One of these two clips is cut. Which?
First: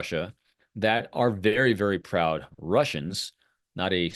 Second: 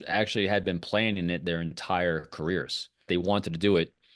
second; 1 cut; at 3.1 s

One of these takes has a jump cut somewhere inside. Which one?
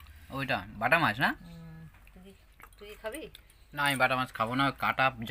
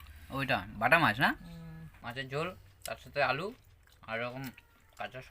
second; 1 cut; at 1.8 s

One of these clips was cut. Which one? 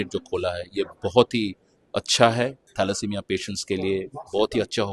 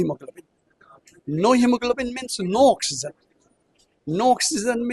first; 1 cut; at 2.6 s

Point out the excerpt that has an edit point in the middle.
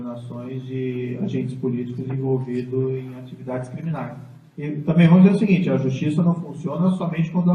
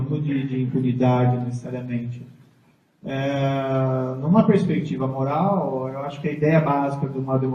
second; 1 cut; at 2.0 s

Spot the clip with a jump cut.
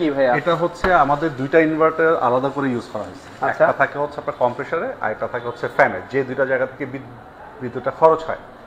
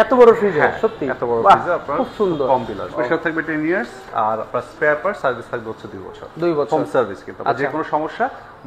second; 1 cut; at 3.0 s

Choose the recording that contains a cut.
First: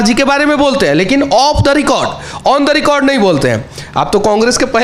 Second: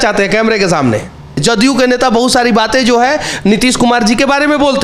second; 1 cut; at 1.4 s

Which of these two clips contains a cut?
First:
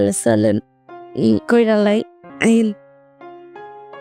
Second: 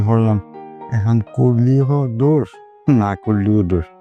first; 1 cut; at 2.2 s

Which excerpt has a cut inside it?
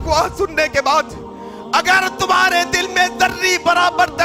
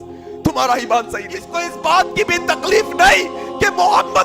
second; 1 cut; at 1.6 s

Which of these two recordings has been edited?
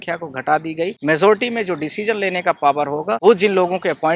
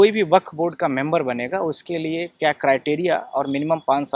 first; 2 cuts; at 1.0 s, 3.2 s

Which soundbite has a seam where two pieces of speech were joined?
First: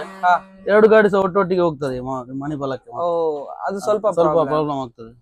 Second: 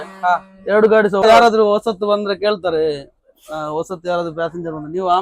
second; 1 cut; at 1.2 s

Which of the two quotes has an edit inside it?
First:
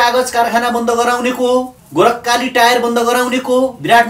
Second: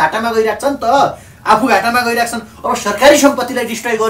first; 1 cut; at 1.8 s

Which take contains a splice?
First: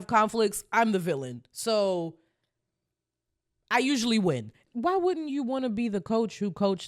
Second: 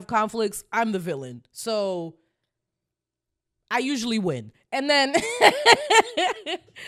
first; 1 cut; at 4.5 s

